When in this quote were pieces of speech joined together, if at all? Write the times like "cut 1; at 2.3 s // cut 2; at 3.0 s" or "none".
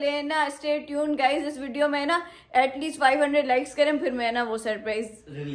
none

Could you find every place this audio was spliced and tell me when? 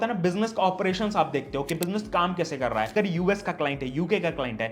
cut 1; at 2.9 s

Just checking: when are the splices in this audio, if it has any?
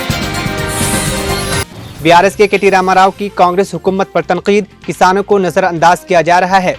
cut 1; at 1.5 s

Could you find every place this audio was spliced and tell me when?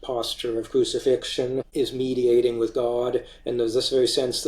cut 1; at 1.7 s

